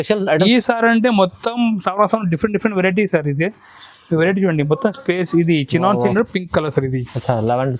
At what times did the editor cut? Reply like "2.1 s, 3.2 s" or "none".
6.1 s